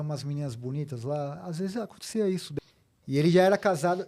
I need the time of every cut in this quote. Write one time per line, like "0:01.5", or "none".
0:02.5